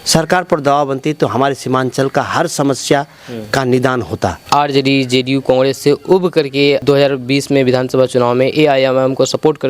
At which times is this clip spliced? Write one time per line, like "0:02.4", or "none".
0:04.4